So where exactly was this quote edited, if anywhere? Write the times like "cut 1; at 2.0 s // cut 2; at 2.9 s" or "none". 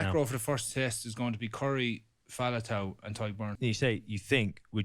cut 1; at 3.5 s